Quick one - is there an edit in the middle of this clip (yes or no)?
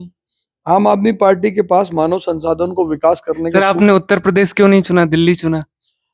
yes